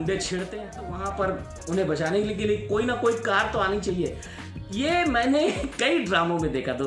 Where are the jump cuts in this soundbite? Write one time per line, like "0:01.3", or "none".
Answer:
0:01.1